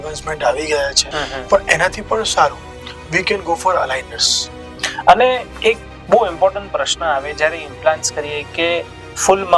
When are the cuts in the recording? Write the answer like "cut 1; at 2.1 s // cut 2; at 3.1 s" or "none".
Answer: cut 1; at 1.1 s // cut 2; at 4.7 s

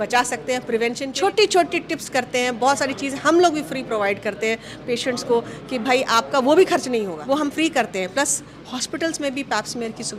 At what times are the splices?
cut 1; at 1.0 s // cut 2; at 7.2 s

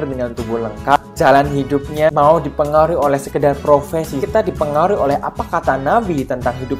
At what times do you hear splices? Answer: cut 1; at 1.0 s // cut 2; at 2.1 s // cut 3; at 4.2 s

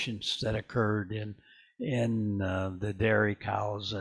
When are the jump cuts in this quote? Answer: none

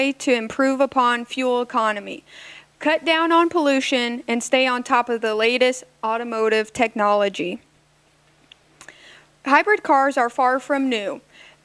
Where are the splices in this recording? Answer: cut 1; at 0.9 s

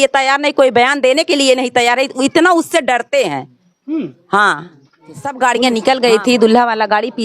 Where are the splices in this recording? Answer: cut 1; at 5.3 s

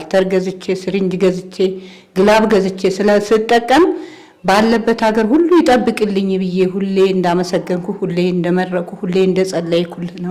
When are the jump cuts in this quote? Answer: none

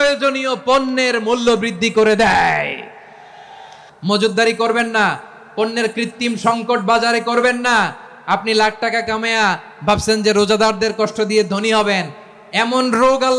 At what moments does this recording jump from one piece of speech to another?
cut 1; at 3.8 s

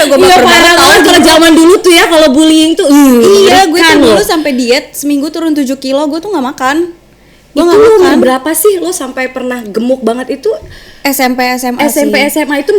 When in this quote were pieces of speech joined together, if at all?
none

